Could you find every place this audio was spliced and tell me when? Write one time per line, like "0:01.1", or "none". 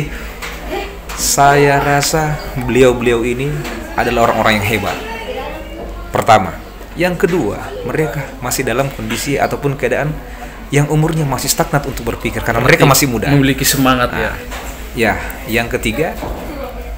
none